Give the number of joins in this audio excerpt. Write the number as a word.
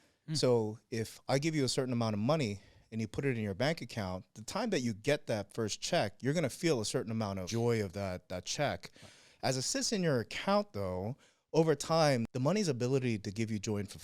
two